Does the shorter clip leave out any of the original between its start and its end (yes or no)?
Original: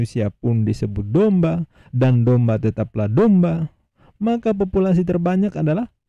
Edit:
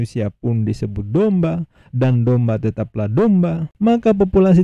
yes